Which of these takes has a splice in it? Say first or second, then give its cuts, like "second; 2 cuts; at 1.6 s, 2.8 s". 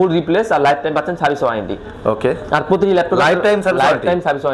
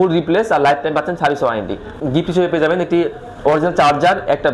second; 1 cut; at 1.9 s